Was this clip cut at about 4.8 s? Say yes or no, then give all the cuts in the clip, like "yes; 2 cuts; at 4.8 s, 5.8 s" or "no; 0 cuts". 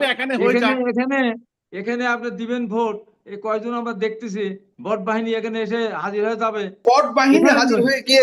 no; 1 cut; at 6.8 s